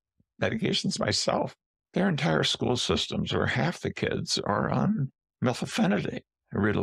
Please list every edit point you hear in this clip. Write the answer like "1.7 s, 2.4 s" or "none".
1.5 s, 5.2 s